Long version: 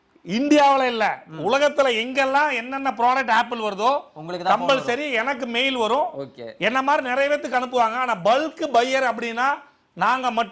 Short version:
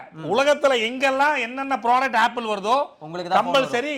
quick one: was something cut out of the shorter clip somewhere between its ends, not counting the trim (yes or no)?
no